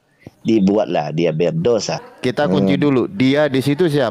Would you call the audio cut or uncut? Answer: cut